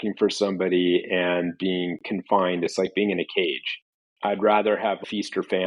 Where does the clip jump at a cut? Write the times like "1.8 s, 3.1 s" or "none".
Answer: none